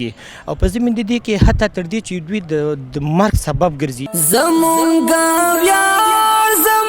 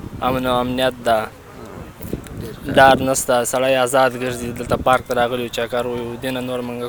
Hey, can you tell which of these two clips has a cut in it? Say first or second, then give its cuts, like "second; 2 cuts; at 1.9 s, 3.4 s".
first; 1 cut; at 4.0 s